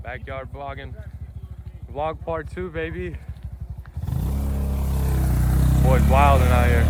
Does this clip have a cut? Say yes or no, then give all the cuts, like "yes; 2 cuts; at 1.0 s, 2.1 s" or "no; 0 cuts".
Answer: no; 0 cuts